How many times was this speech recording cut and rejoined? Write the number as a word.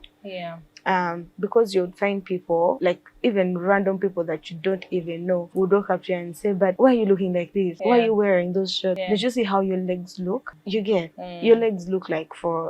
six